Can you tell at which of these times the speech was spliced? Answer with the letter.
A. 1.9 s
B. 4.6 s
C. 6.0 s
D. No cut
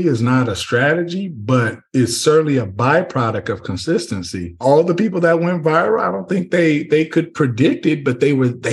B